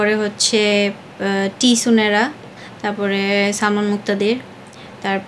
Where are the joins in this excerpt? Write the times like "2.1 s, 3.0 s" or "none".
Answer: none